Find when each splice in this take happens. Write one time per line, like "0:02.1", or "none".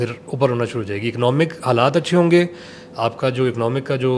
none